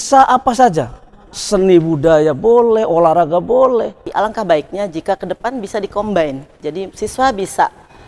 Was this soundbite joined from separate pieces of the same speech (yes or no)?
yes